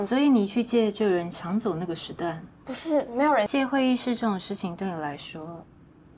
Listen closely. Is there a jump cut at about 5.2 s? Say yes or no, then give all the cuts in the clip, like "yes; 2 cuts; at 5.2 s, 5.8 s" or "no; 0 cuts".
no; 1 cut; at 3.5 s